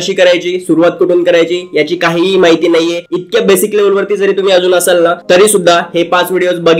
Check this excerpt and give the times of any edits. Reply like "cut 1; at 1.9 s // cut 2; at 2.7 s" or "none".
none